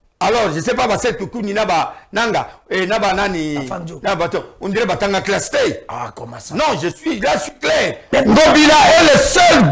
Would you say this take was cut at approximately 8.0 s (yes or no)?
yes